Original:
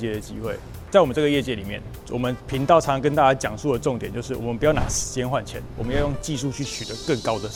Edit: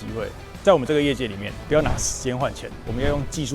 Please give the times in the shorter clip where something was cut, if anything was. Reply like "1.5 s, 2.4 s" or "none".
1.6 s